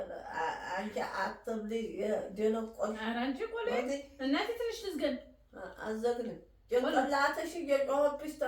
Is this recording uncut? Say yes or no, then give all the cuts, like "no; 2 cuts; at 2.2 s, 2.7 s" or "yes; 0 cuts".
yes; 0 cuts